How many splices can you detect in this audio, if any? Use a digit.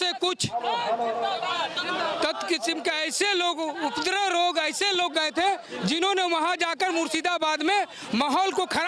0